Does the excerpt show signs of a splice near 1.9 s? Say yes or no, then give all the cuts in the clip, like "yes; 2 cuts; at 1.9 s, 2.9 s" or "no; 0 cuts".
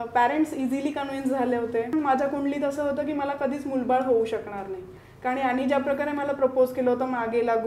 yes; 2 cuts; at 1.9 s, 4.9 s